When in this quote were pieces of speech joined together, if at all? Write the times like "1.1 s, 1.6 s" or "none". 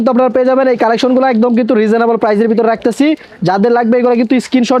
none